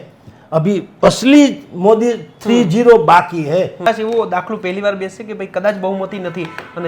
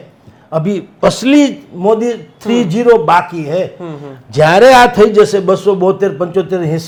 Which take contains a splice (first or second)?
first